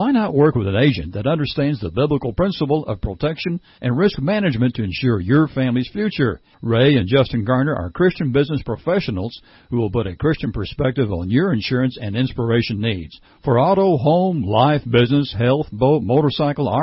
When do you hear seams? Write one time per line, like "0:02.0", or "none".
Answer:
none